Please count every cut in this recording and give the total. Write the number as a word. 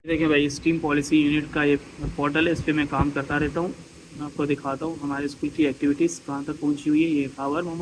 zero